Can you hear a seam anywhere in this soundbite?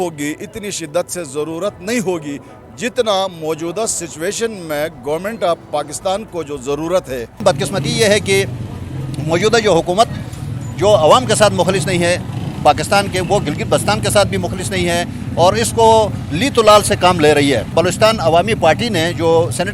yes; 2 cuts; at 7.4 s, 17.7 s

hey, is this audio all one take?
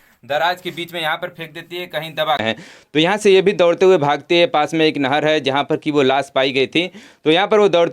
no; 1 cut; at 2.4 s

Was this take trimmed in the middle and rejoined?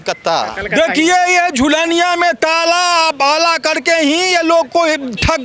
no; 0 cuts

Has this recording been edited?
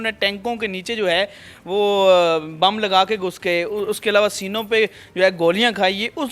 no; 0 cuts

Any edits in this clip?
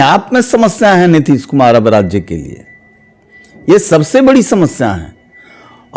no; 0 cuts

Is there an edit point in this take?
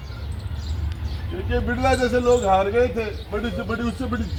no; 0 cuts

